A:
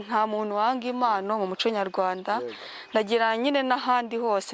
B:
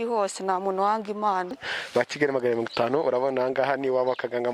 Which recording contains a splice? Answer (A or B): B